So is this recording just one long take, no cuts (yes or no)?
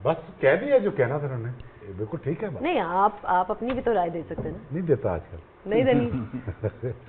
yes